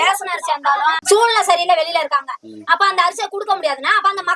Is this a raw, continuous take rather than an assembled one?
no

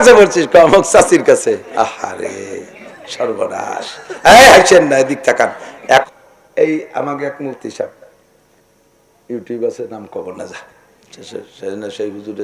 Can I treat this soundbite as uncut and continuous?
no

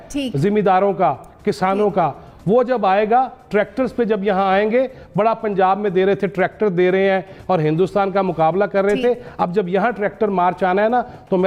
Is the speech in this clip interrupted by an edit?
no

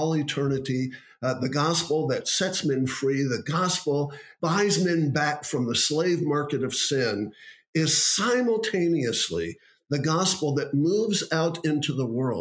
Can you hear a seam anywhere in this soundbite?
yes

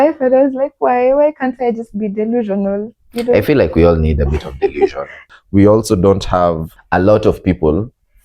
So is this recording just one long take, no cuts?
no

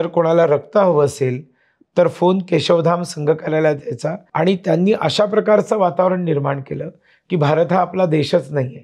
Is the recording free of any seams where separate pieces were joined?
no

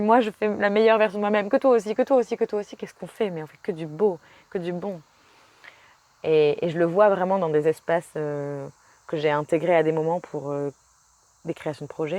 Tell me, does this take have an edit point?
no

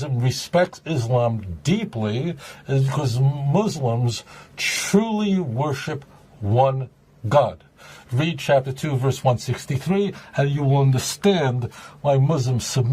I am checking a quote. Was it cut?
no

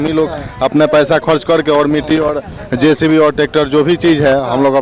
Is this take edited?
no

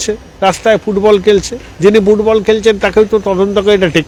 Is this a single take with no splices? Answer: yes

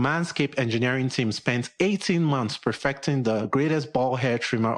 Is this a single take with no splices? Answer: yes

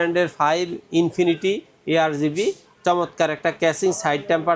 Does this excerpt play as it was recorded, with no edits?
yes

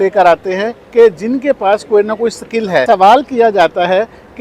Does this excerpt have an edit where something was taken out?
yes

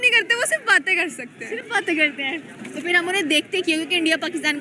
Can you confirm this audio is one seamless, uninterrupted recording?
yes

